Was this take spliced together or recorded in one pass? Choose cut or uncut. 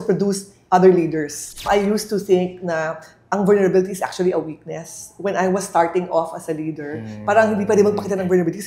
cut